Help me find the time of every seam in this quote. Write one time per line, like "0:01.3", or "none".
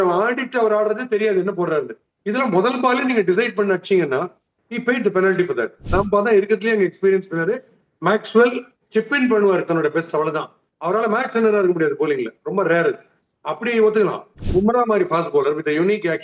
0:05.8
0:14.3